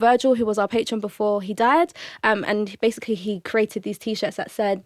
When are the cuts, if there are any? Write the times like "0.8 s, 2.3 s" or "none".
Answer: none